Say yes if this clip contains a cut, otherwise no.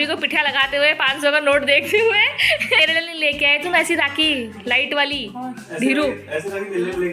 yes